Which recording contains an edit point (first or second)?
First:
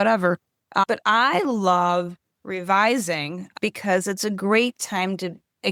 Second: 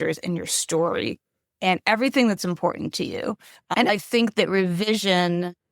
second